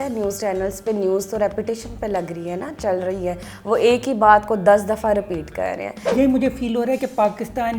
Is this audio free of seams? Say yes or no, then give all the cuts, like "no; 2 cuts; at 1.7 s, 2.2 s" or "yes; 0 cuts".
no; 1 cut; at 6.1 s